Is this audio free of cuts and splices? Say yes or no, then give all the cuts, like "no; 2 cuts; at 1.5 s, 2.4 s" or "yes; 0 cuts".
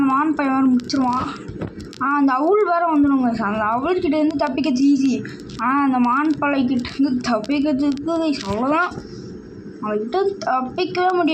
yes; 0 cuts